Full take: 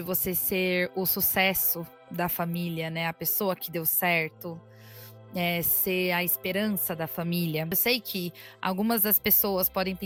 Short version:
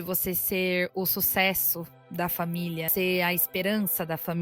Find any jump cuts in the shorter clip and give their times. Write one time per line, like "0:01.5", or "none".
0:02.9